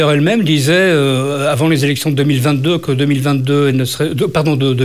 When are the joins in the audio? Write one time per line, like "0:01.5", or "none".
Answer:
none

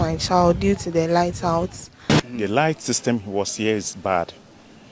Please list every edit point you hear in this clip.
0:02.1

